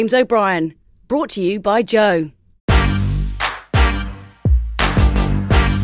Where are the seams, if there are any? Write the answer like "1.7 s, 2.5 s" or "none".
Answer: 2.5 s